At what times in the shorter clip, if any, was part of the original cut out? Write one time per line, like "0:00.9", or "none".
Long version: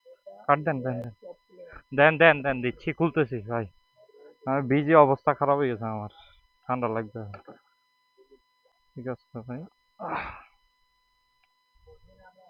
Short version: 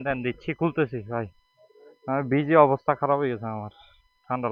none